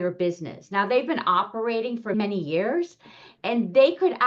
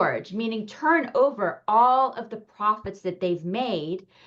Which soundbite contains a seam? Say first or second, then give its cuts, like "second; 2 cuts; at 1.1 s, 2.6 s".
first; 2 cuts; at 2.1 s, 3.4 s